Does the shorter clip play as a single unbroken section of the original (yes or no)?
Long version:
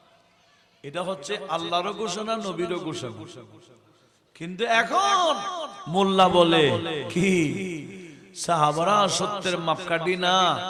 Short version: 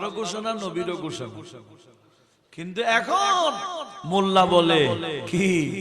yes